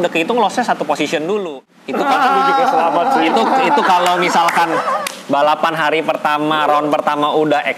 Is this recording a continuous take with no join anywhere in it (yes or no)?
no